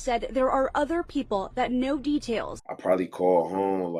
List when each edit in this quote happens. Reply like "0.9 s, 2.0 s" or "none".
2.6 s